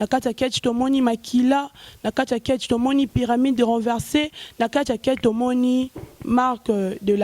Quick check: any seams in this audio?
no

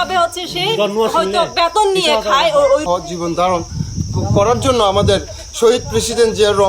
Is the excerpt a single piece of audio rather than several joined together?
no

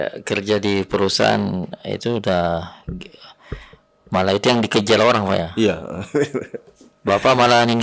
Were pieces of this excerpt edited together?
no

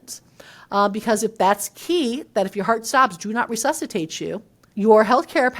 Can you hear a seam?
yes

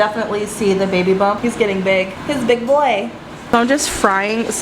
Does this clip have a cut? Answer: yes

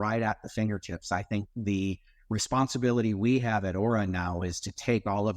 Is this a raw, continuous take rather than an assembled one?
no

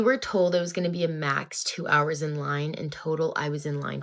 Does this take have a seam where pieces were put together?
no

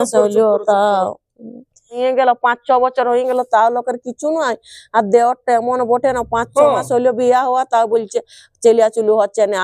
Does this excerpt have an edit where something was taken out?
yes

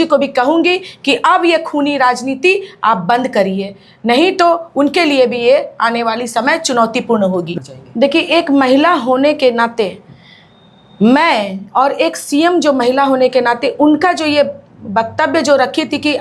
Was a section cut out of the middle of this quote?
yes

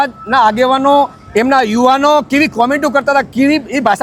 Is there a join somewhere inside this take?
no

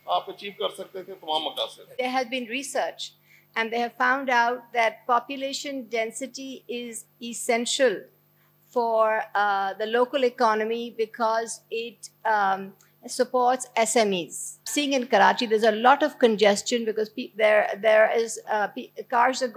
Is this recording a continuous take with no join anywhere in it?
no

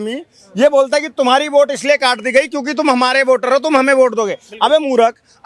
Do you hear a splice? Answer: no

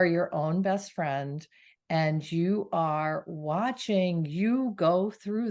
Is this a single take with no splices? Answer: yes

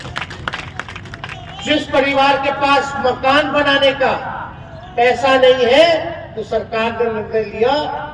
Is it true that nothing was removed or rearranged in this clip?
yes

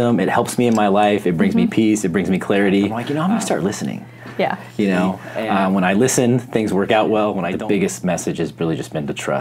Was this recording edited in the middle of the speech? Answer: yes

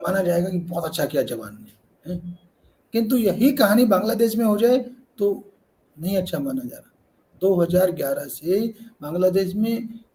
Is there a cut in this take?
no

